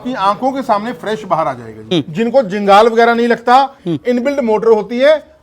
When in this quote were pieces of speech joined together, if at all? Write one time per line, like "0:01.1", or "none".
0:01.9
0:03.8